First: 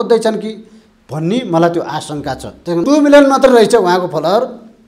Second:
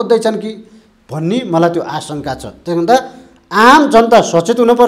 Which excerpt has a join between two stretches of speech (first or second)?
first